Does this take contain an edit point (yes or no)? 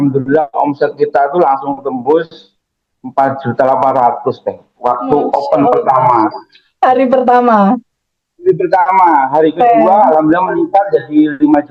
no